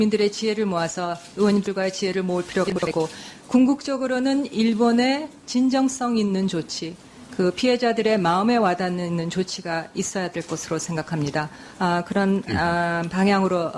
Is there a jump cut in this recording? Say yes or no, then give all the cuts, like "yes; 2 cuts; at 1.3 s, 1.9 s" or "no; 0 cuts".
yes; 1 cut; at 3.9 s